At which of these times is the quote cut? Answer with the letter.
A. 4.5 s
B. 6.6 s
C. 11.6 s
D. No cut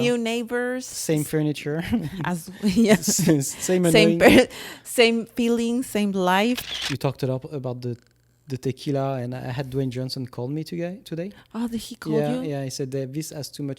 B